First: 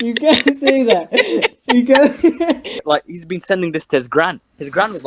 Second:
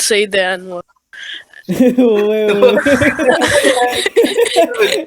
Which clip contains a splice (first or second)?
first